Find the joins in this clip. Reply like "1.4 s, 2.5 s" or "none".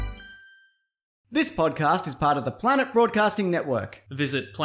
1.3 s